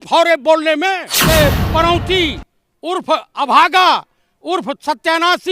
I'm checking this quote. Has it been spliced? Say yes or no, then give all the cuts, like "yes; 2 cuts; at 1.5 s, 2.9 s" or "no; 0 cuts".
yes; 1 cut; at 1.1 s